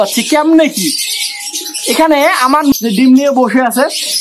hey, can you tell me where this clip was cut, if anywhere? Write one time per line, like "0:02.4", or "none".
0:02.7